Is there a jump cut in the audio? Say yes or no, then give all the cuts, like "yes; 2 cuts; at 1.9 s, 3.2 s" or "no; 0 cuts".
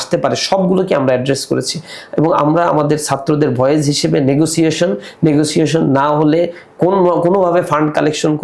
no; 0 cuts